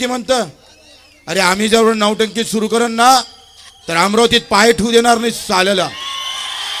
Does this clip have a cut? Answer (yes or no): no